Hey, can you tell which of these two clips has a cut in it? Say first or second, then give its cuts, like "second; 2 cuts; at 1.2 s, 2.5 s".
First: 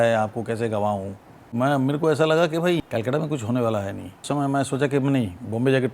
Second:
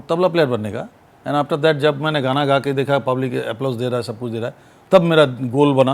first; 3 cuts; at 1.5 s, 2.8 s, 4.2 s